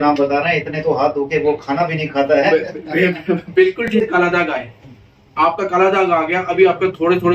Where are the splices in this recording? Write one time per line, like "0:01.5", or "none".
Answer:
0:03.9